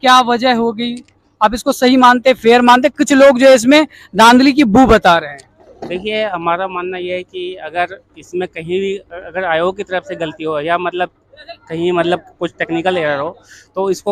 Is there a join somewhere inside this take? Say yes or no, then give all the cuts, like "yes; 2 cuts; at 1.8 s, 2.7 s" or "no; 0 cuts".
no; 0 cuts